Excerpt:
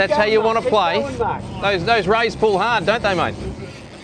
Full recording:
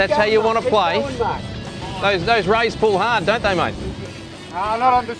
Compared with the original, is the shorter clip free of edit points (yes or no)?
no